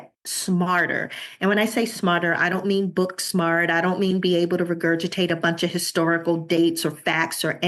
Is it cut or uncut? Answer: uncut